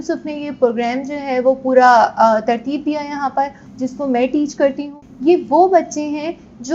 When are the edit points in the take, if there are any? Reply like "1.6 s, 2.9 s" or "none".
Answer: 3.6 s, 4.9 s